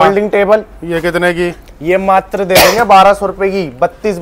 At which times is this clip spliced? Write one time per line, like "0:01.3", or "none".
none